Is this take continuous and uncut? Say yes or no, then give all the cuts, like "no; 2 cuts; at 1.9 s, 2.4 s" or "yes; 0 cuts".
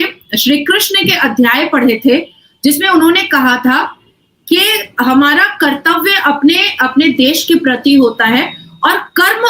yes; 0 cuts